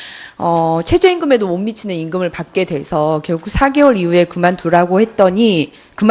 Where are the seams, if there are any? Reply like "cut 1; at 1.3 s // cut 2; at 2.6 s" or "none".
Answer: cut 1; at 3.2 s